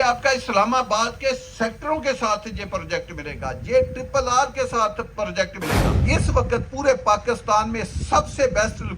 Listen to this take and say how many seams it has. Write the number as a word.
one